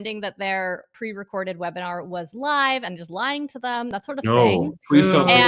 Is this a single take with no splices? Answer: no; 1 cut; at 0.9 s

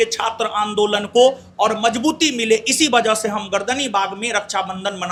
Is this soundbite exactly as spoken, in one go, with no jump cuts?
yes; 0 cuts

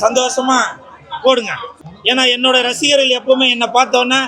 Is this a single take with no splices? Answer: no; 1 cut; at 1.7 s

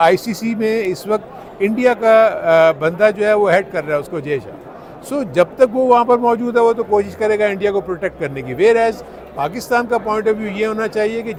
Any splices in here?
no; 0 cuts

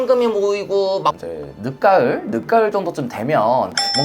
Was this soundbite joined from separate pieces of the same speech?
yes; 1 cut; at 1.2 s

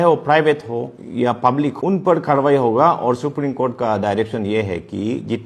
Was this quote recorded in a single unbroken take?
no; 2 cuts; at 1.0 s, 1.7 s

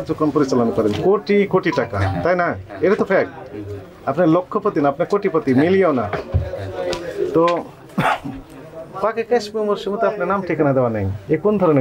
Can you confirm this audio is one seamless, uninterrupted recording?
yes; 0 cuts

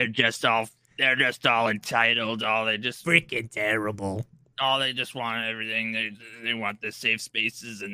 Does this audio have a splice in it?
no; 0 cuts

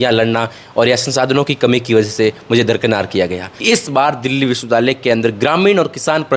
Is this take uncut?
no; 1 cut; at 3.5 s

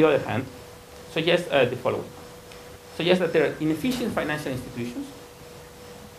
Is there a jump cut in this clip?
yes; 1 cut; at 4.8 s

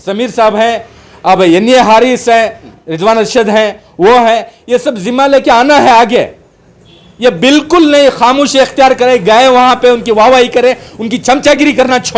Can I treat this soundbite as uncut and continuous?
no; 1 cut; at 2.8 s

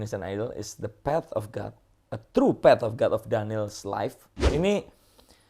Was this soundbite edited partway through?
yes; 1 cut; at 4.5 s

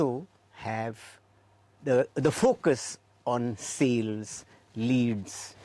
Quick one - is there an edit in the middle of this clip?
no; 0 cuts

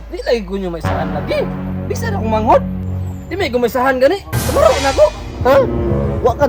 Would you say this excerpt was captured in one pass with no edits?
yes; 0 cuts

